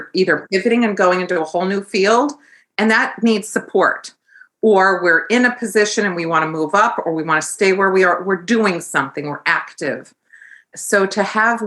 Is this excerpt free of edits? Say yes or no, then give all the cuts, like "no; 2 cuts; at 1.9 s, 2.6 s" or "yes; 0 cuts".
no; 1 cut; at 10.7 s